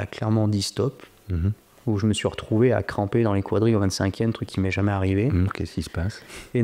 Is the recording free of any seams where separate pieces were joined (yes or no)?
yes